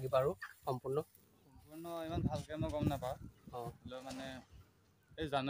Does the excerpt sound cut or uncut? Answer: uncut